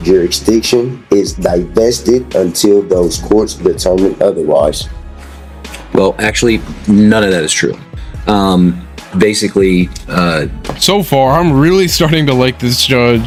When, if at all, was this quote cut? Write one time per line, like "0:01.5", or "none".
none